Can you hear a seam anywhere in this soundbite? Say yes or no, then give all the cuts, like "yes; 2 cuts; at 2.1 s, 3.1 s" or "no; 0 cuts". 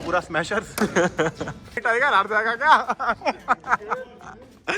yes; 1 cut; at 1.8 s